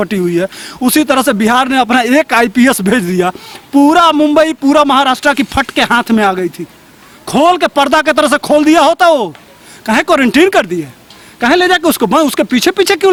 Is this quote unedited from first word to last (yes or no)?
yes